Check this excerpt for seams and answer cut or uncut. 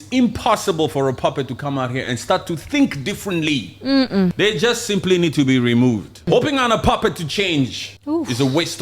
cut